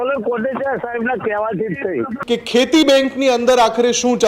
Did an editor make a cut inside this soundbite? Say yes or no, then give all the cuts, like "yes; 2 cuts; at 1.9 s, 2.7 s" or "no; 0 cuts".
yes; 1 cut; at 2.1 s